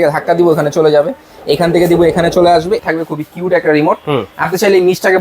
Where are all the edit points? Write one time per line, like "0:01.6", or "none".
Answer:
0:02.8